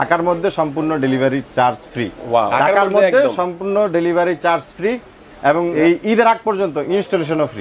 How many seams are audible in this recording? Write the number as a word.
two